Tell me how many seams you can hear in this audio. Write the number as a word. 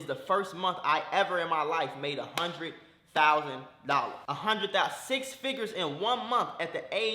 one